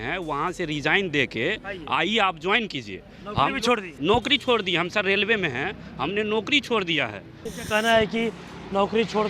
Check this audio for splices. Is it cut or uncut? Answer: cut